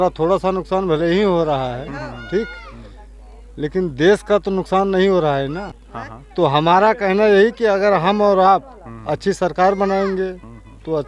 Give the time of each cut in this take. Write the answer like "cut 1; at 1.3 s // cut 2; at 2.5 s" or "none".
cut 1; at 5.8 s

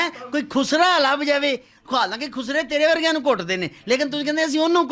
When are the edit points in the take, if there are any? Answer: none

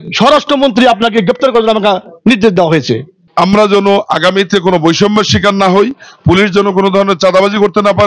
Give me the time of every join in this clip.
cut 1; at 3.2 s

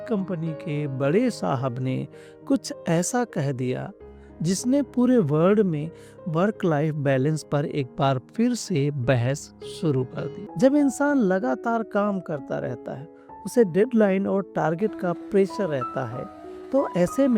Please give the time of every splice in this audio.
cut 1; at 10.4 s

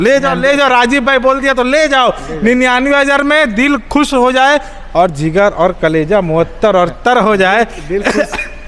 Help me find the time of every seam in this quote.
none

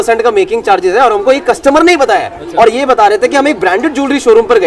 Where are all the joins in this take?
none

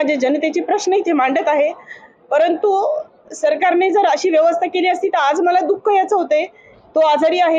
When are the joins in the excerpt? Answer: none

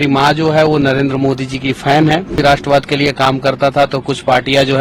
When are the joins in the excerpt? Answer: cut 1; at 2.4 s

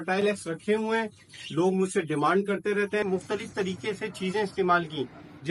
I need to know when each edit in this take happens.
cut 1; at 3.0 s

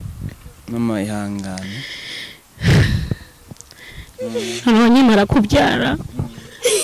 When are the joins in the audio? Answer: cut 1; at 4.1 s

